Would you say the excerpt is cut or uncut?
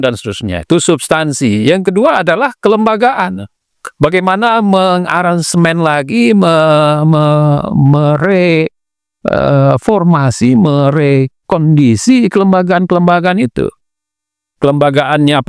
uncut